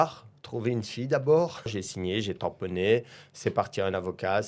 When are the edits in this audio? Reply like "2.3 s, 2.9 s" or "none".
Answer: 1.7 s